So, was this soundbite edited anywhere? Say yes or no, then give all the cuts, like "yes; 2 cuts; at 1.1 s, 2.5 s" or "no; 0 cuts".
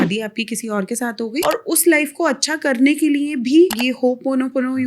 yes; 2 cuts; at 1.4 s, 3.8 s